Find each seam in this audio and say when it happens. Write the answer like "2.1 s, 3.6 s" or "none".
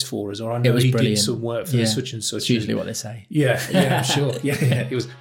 none